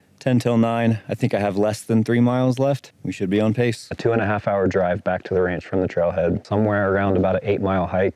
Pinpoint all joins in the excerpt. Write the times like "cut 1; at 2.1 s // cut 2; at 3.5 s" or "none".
cut 1; at 2.9 s // cut 2; at 3.9 s // cut 3; at 6.4 s

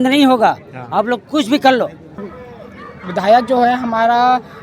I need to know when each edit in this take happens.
cut 1; at 2.3 s

